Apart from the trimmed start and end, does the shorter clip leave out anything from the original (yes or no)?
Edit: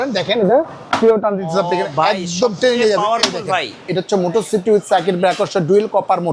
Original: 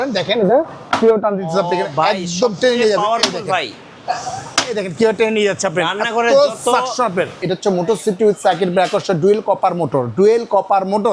yes